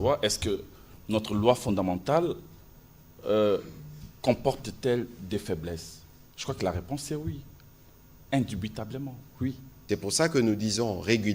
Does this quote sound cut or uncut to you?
cut